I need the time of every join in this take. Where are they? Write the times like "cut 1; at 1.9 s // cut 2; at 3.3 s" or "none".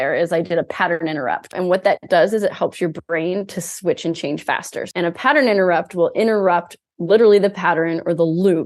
cut 1; at 1.2 s // cut 2; at 4.8 s